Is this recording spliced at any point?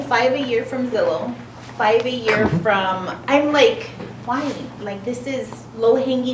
no; 0 cuts

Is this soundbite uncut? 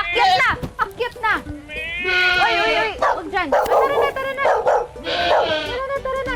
yes; 0 cuts

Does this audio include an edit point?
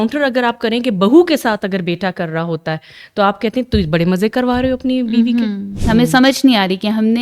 yes; 1 cut; at 5.7 s

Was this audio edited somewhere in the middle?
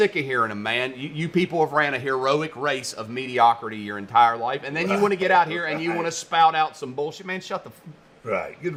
no; 0 cuts

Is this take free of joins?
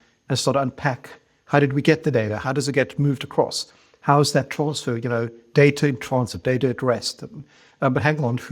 no; 1 cut; at 2.4 s

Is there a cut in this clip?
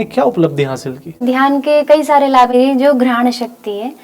yes; 2 cuts; at 1.2 s, 2.5 s

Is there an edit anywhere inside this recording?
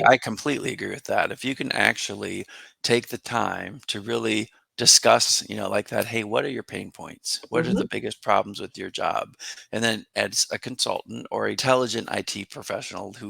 yes; 1 cut; at 11.6 s

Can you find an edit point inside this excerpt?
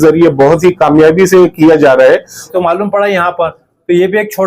yes; 1 cut; at 2.5 s

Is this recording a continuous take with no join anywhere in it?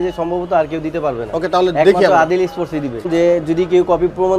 no; 1 cut; at 3.1 s

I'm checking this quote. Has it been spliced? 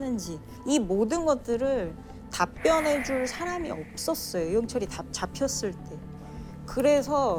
no; 0 cuts

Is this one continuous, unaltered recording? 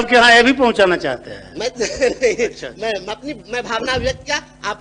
yes; 0 cuts

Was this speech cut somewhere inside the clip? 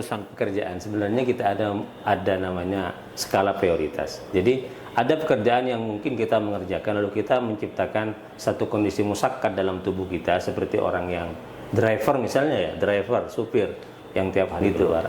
no; 0 cuts

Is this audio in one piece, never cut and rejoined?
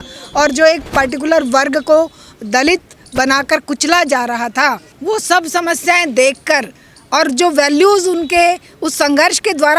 no; 1 cut; at 4.9 s

